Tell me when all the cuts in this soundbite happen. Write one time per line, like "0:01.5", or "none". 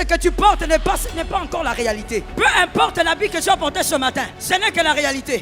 0:02.3
0:04.4